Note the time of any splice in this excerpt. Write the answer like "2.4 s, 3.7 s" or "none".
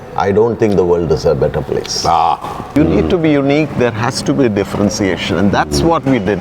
2.7 s